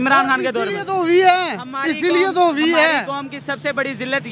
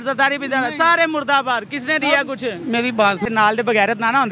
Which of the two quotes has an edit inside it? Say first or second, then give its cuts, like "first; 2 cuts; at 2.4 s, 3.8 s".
second; 1 cut; at 3.3 s